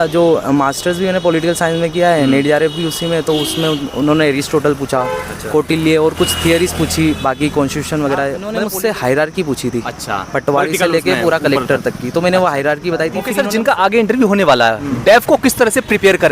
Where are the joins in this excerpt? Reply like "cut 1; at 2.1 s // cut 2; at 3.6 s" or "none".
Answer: cut 1; at 8.6 s // cut 2; at 13.2 s